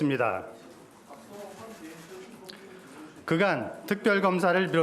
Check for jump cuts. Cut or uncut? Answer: cut